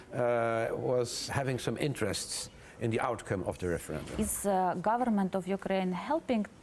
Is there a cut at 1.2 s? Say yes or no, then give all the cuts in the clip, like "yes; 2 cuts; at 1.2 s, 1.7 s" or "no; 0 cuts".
yes; 2 cuts; at 1.2 s, 4.1 s